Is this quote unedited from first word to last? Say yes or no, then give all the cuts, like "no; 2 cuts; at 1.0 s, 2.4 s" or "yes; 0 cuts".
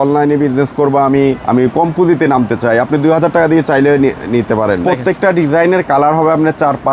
no; 2 cuts; at 1.4 s, 4.8 s